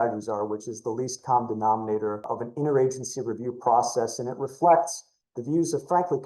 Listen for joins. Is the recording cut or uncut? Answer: cut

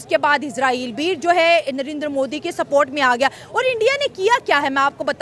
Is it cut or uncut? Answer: uncut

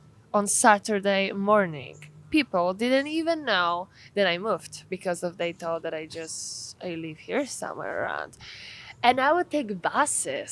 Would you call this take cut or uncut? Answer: uncut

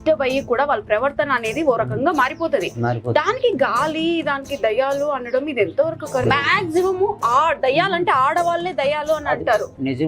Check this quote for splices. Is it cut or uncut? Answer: cut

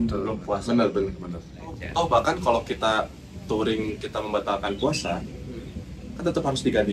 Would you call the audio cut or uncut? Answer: cut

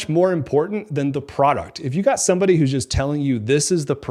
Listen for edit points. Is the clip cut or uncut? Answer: uncut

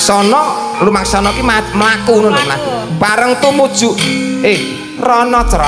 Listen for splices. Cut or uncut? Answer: uncut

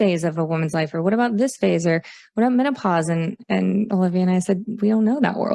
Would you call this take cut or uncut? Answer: uncut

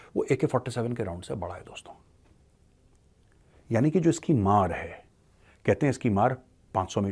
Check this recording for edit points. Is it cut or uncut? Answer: uncut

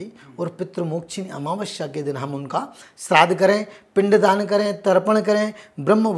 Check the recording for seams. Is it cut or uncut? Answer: uncut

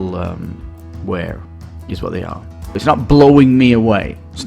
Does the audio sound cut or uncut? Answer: cut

